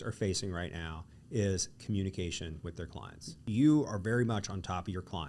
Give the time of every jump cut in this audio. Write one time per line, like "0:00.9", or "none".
0:03.4

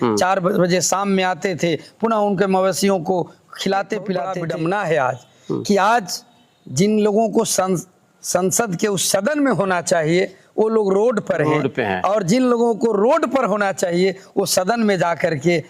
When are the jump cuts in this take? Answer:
0:04.3

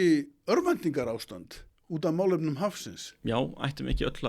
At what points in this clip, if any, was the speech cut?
none

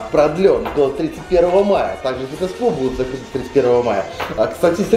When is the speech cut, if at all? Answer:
none

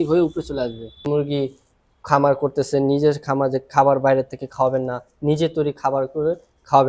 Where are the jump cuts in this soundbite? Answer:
0:01.0

